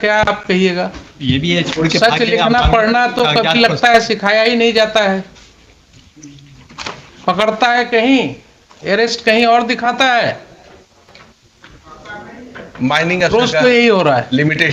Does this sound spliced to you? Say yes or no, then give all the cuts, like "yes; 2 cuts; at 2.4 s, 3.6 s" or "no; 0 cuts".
no; 0 cuts